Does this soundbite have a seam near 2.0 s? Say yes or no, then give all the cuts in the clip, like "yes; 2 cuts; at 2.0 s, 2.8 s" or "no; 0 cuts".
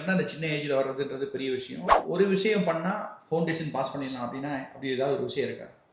yes; 1 cut; at 2.0 s